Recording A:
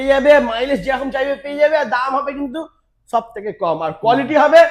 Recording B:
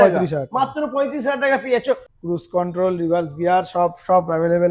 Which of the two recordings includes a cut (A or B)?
B